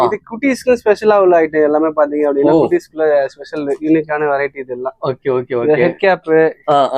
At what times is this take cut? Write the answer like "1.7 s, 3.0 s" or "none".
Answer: none